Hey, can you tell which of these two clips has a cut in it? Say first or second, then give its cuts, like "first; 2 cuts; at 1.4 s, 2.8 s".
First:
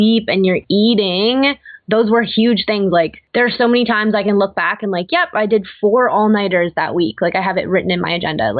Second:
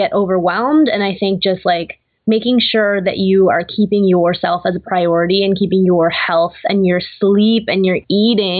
first; 1 cut; at 3.2 s